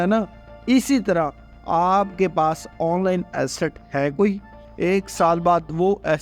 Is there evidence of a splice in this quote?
yes; 1 cut; at 4.6 s

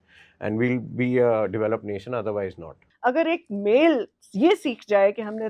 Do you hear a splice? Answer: yes; 1 cut; at 2.5 s

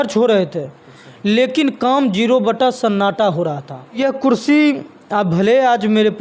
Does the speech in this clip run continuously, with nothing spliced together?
no; 1 cut; at 4.0 s

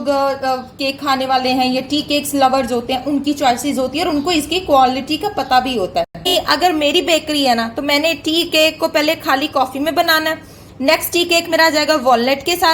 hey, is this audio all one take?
no; 1 cut; at 6.3 s

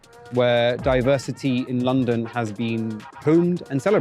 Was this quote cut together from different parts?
yes; 1 cut; at 3.0 s

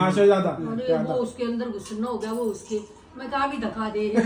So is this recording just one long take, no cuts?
yes; 0 cuts

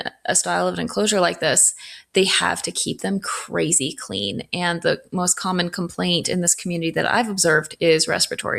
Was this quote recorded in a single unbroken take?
yes; 0 cuts

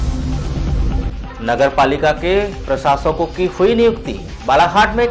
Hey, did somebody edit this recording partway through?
yes; 1 cut; at 1.1 s

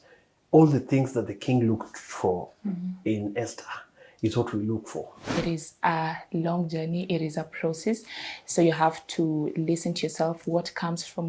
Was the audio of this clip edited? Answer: yes; 1 cut; at 5.3 s

